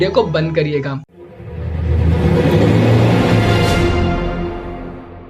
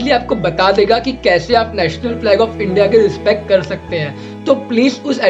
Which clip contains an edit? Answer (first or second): first